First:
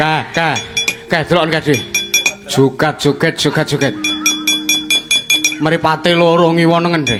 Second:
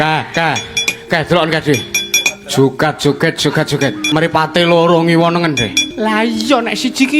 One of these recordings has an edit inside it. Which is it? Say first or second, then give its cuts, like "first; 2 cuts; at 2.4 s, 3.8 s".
second; 2 cuts; at 4.0 s, 5.8 s